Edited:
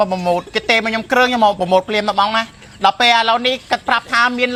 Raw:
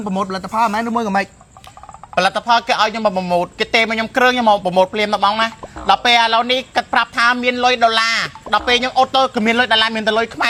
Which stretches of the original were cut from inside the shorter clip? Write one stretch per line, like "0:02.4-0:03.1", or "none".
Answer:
none